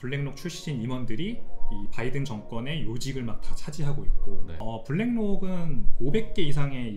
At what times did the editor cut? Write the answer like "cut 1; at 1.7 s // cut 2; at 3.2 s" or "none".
cut 1; at 4.5 s

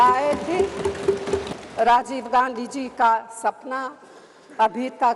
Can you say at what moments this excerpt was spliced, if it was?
cut 1; at 1.5 s

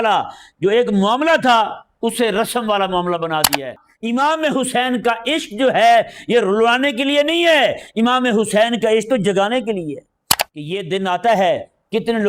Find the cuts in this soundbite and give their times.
cut 1; at 3.9 s // cut 2; at 10.3 s

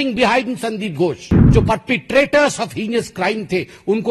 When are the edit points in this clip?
cut 1; at 1.4 s

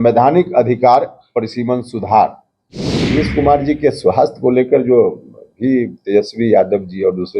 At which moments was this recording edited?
cut 1; at 3.1 s

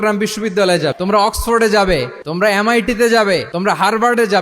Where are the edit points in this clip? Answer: cut 1; at 0.9 s // cut 2; at 2.2 s // cut 3; at 3.5 s

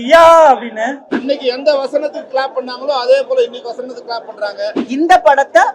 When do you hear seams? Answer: cut 1; at 1.1 s // cut 2; at 4.8 s

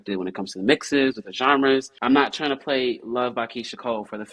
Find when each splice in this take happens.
cut 1; at 1.9 s

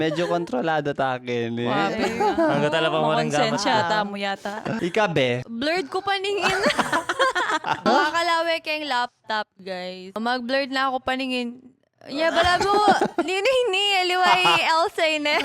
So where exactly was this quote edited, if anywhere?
cut 1; at 4.8 s // cut 2; at 5.5 s // cut 3; at 7.9 s // cut 4; at 10.2 s

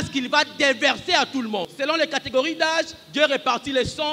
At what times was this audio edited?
cut 1; at 1.7 s

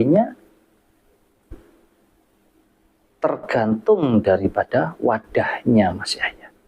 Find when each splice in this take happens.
none

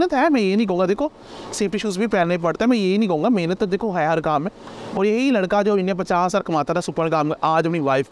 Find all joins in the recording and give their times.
none

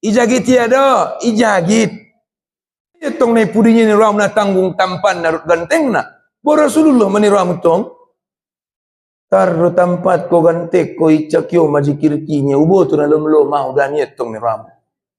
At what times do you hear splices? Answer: cut 1; at 3.1 s

